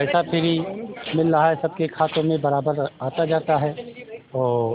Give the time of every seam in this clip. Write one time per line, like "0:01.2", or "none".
none

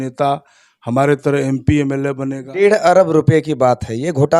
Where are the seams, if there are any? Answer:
0:02.4

